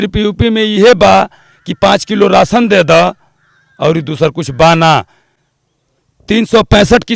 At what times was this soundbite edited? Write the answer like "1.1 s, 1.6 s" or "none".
none